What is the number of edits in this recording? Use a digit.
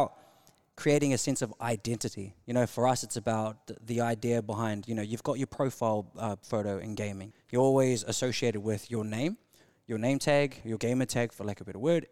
1